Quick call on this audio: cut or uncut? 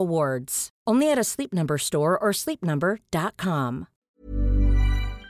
cut